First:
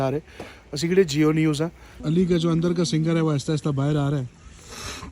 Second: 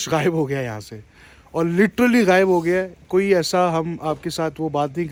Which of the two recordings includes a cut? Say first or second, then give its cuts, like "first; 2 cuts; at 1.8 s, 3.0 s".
first; 1 cut; at 1.9 s